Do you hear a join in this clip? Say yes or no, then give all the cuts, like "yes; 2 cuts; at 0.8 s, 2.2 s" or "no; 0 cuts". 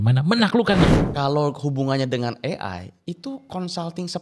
yes; 2 cuts; at 1.0 s, 2.9 s